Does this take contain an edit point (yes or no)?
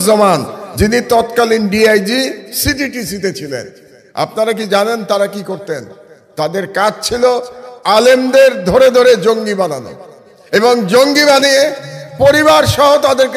no